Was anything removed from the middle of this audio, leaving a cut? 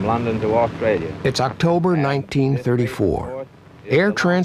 yes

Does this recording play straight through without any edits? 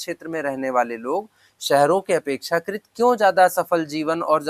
yes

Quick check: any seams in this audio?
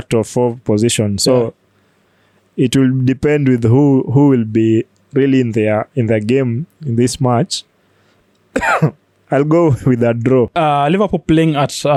no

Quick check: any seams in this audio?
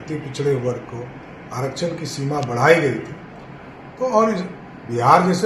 no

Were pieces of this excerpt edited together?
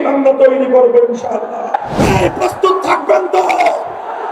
yes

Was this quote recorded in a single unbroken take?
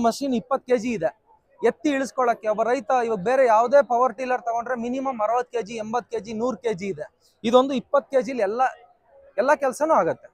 yes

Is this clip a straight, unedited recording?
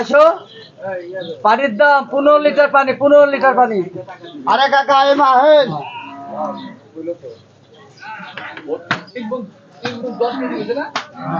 yes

